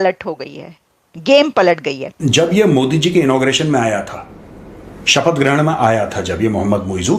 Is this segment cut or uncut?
cut